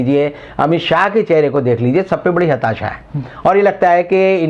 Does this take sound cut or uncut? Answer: uncut